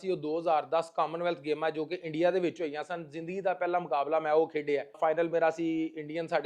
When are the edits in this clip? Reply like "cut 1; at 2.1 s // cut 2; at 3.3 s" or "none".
cut 1; at 5.0 s